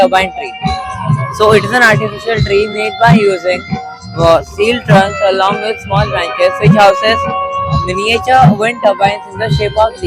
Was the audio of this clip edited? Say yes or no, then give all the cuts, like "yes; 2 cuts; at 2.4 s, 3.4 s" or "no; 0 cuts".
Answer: no; 0 cuts